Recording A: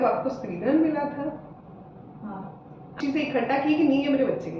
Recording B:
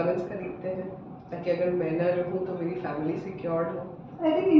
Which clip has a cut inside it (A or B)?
A